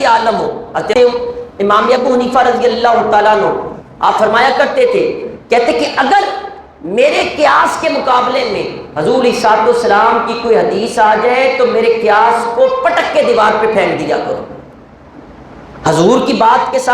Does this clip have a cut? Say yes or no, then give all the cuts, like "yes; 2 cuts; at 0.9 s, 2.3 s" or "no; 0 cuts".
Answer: yes; 1 cut; at 0.9 s